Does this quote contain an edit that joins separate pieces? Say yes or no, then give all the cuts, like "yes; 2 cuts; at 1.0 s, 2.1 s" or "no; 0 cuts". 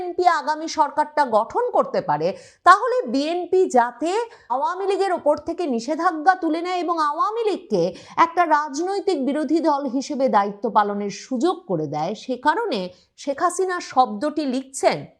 yes; 1 cut; at 4.6 s